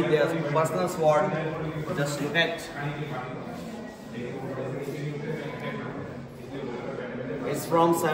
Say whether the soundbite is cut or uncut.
uncut